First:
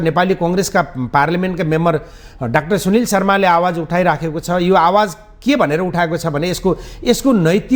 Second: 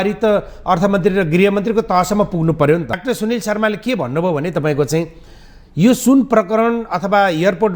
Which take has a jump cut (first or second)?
second